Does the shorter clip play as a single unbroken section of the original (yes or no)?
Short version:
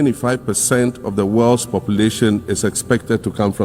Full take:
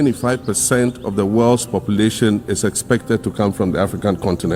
yes